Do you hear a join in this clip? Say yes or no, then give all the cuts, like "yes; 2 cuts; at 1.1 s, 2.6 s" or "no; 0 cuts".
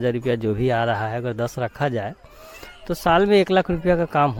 no; 0 cuts